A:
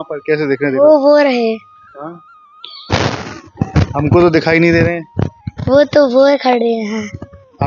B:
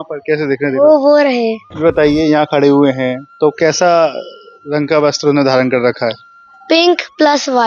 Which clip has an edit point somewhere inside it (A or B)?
B